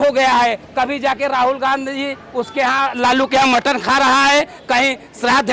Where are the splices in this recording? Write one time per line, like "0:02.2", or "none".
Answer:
none